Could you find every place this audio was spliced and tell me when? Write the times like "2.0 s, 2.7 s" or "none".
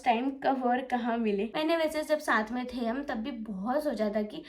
1.5 s